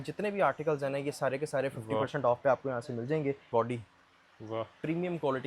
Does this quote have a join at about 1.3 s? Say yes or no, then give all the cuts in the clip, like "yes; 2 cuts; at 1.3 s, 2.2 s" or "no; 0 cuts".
no; 1 cut; at 3.5 s